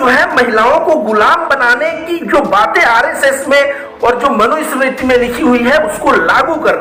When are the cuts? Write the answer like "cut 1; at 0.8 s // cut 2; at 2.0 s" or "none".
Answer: none